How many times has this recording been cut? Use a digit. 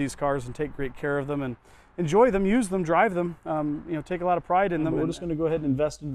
1